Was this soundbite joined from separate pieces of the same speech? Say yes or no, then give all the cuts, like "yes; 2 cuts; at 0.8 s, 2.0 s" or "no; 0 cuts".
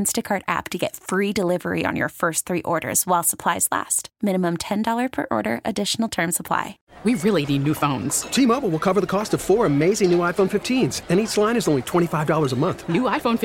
yes; 1 cut; at 6.8 s